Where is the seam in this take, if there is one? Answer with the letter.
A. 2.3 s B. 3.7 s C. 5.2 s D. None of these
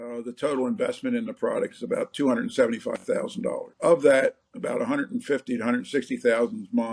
B